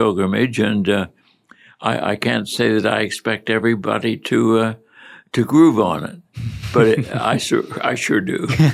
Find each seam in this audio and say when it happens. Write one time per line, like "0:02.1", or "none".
none